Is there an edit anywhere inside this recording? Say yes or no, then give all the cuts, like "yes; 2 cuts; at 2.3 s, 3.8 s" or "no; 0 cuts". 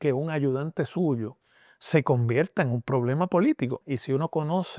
yes; 1 cut; at 3.8 s